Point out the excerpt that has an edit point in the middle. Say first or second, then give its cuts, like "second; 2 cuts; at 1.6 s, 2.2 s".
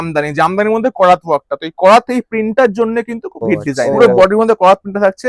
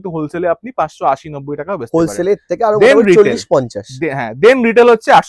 first; 1 cut; at 3.9 s